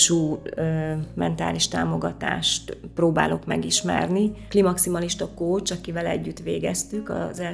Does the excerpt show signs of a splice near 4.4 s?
yes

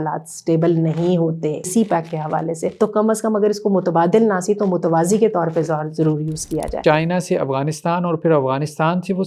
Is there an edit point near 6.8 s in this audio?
yes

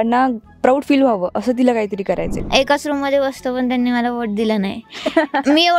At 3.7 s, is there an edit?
no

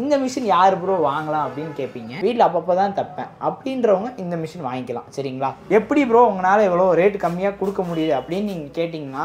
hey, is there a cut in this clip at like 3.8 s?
no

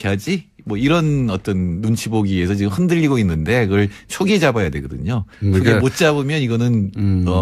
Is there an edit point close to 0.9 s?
yes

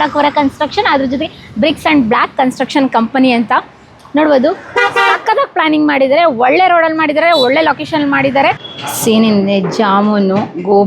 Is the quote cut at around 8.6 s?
yes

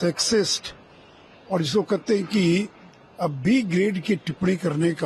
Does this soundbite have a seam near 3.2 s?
no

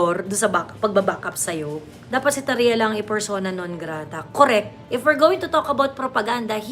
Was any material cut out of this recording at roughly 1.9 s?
yes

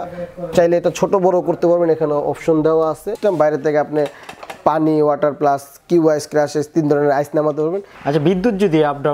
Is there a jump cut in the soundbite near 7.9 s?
yes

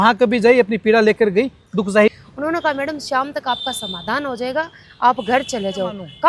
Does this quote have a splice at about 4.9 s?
no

